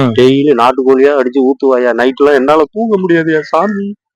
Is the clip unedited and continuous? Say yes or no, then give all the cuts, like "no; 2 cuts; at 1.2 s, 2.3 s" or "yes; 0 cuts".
yes; 0 cuts